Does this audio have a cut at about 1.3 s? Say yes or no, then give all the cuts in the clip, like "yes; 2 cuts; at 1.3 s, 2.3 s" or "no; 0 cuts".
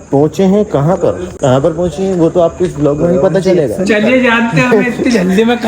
yes; 1 cut; at 1.3 s